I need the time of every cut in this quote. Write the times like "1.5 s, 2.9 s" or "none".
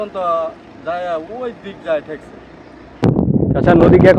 3.3 s